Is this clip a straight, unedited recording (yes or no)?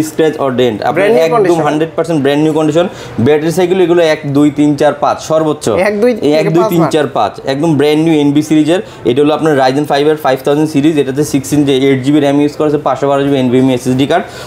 yes